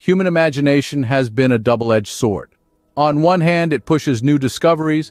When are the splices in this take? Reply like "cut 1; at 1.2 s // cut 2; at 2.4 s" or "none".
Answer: none